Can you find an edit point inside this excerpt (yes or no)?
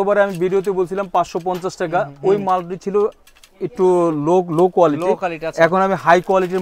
no